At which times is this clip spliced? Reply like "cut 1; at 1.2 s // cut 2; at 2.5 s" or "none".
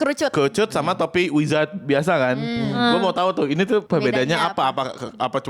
cut 1; at 3.9 s